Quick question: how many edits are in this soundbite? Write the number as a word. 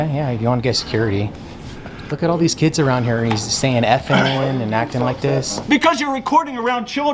one